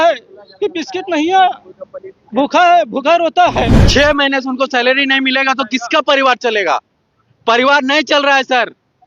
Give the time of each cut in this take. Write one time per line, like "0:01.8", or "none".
0:03.8